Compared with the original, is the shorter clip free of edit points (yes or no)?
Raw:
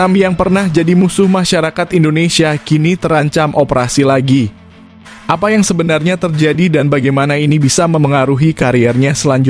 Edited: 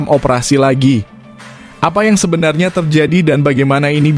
yes